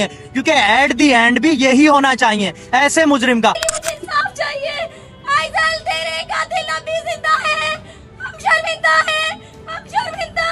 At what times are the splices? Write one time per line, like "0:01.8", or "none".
0:03.6

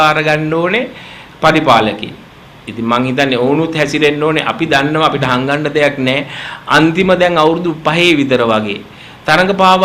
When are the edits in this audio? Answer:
none

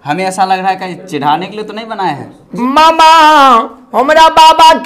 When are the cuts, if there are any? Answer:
0:02.4

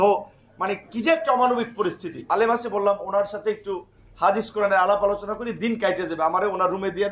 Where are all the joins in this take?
0:02.1

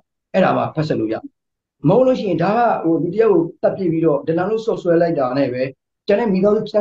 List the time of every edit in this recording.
none

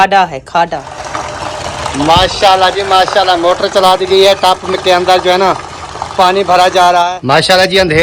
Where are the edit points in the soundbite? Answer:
0:01.0
0:07.2

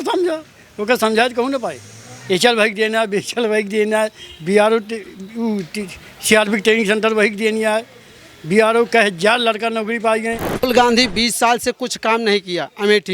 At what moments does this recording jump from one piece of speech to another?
0:10.6

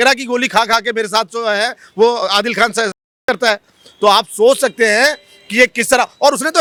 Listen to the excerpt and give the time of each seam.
none

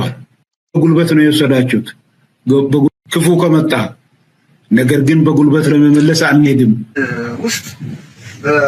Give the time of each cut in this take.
0:07.1

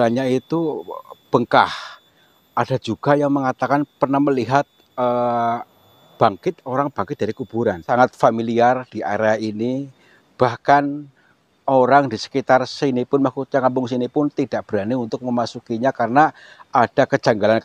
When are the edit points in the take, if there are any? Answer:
0:07.8

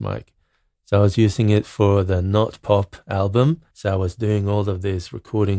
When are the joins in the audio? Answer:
0:03.7

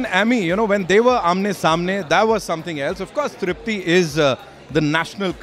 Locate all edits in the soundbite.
none

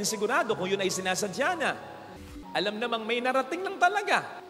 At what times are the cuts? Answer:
0:02.3

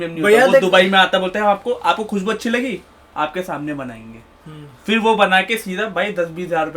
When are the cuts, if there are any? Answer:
none

